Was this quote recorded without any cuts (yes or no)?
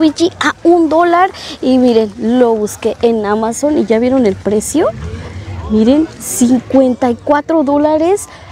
yes